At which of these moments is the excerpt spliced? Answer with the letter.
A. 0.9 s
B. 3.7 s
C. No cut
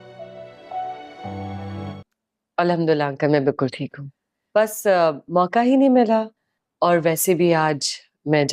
A